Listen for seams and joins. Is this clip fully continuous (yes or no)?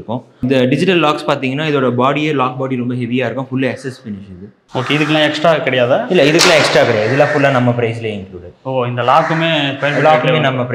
yes